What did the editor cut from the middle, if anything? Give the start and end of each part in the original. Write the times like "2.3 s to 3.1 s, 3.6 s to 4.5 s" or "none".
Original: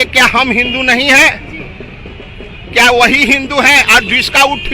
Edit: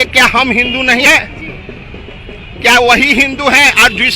1.1 s to 1.2 s